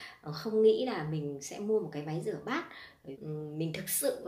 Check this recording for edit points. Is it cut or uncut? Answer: cut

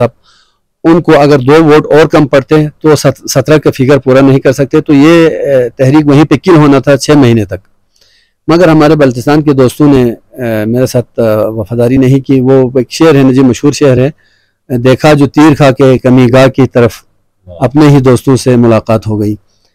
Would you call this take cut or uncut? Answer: uncut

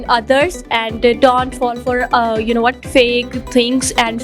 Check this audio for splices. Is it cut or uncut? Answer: uncut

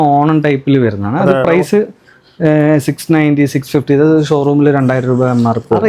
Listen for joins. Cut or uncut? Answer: uncut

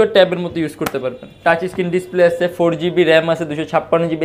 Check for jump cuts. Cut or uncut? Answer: cut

